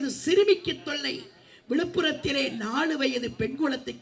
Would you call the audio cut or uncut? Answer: uncut